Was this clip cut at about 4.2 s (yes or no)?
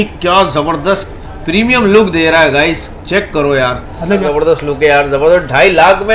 yes